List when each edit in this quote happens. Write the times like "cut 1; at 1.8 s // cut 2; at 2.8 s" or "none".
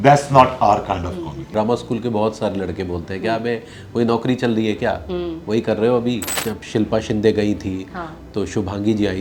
cut 1; at 1.4 s // cut 2; at 6.3 s